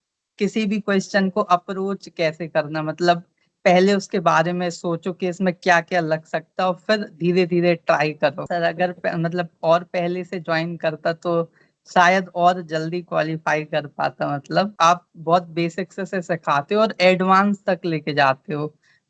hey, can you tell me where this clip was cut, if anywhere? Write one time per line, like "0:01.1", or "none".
0:08.5
0:14.7